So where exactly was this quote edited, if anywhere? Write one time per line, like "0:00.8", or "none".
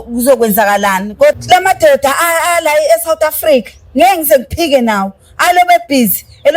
0:01.4